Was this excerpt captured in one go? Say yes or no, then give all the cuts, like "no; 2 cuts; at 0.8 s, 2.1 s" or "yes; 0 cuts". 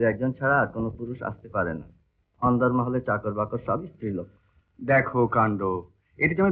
yes; 0 cuts